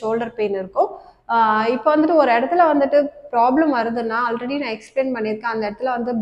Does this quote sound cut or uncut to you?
uncut